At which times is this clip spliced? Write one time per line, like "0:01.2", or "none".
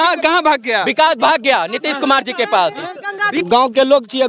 0:03.3